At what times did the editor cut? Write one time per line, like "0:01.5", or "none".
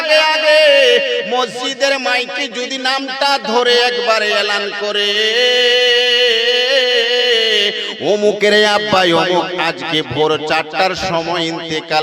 none